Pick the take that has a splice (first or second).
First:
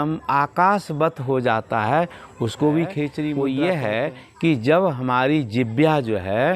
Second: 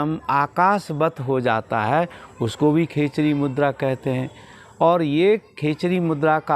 first